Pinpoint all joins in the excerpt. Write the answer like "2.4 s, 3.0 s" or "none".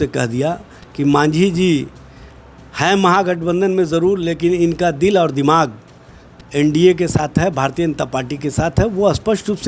none

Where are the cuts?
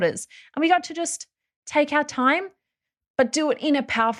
none

